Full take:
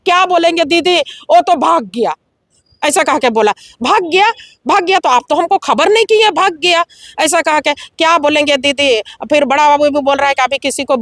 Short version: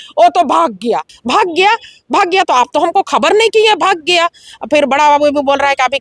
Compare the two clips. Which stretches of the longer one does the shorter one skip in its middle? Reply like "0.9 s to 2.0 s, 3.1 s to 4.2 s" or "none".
2.3 s to 3.7 s, 7.1 s to 9.1 s